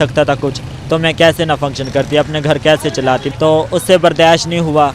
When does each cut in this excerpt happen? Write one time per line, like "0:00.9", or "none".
0:03.3

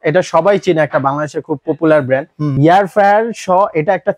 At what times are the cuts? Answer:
0:02.5

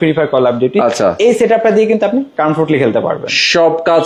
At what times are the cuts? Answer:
none

